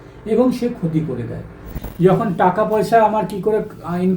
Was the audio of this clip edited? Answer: yes; 1 cut; at 1.7 s

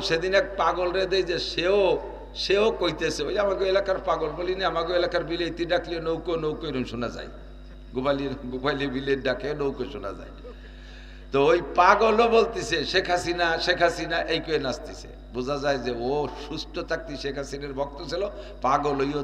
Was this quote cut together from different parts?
no; 0 cuts

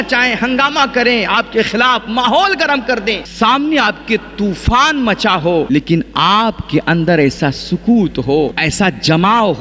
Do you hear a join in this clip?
yes; 3 cuts; at 3.3 s, 5.7 s, 8.6 s

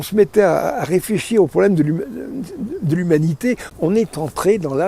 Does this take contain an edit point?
yes; 1 cut; at 3.7 s

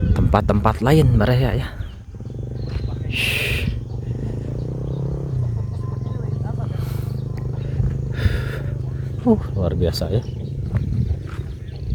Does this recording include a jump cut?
no; 0 cuts

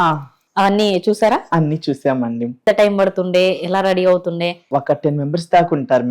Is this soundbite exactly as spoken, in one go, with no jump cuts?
no; 2 cuts; at 2.6 s, 4.6 s

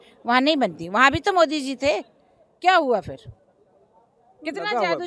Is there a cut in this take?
no; 0 cuts

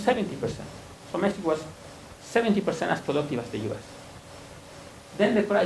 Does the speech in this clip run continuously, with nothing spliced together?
yes; 0 cuts

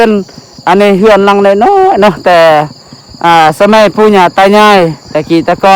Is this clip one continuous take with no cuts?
yes; 0 cuts

